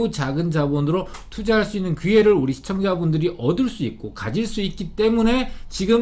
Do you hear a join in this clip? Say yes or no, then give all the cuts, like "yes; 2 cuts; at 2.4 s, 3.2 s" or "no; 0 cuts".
no; 0 cuts